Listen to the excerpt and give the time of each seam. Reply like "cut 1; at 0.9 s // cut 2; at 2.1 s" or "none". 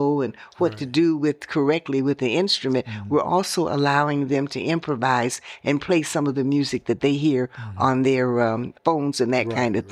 cut 1; at 8.7 s